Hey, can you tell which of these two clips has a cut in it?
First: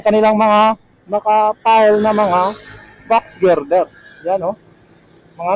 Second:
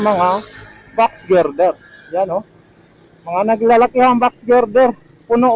first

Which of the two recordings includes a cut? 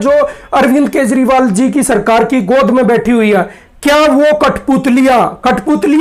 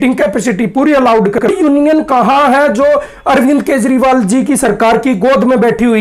second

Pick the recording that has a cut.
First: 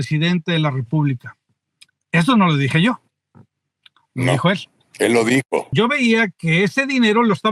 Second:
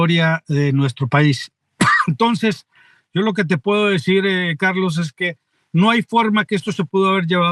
first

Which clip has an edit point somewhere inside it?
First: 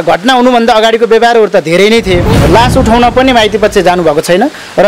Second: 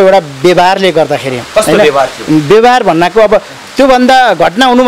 first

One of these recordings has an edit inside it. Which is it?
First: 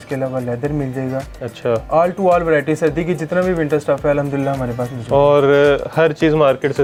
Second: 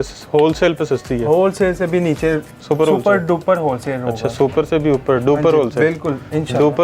second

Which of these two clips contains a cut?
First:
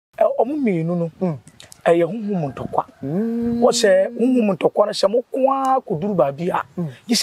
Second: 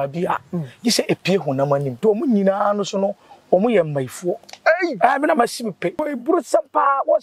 second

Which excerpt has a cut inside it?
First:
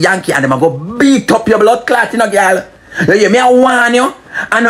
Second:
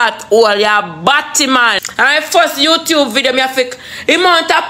second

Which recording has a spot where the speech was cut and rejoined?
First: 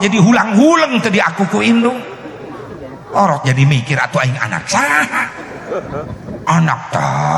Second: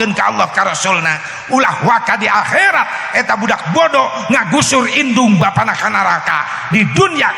first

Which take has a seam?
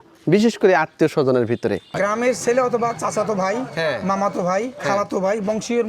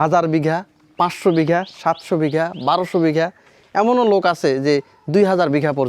first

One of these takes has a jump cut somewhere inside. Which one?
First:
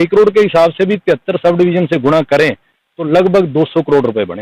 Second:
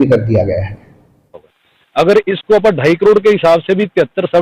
second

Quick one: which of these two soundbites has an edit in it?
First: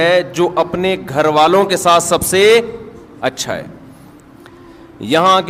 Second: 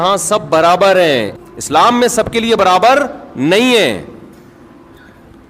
second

